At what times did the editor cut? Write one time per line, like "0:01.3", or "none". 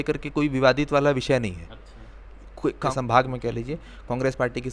0:02.9